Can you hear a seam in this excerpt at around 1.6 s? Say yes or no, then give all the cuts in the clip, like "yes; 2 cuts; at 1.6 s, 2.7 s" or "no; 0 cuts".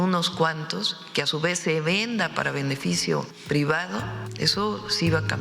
no; 2 cuts; at 3.3 s, 4.2 s